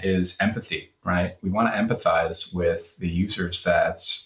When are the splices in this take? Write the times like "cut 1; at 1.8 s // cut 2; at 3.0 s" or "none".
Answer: none